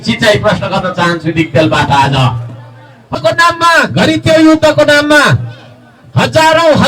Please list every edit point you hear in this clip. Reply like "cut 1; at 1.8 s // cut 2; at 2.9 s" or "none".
cut 1; at 3.2 s